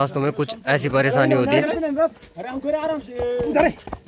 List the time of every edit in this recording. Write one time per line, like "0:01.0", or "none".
none